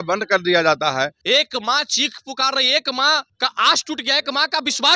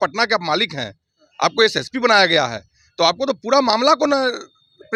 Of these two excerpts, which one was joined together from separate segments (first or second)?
first